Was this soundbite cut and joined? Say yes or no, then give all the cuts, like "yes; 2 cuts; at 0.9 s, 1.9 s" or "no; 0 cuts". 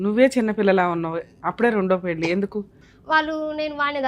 yes; 1 cut; at 2.8 s